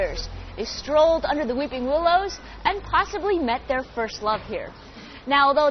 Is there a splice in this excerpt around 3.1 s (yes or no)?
yes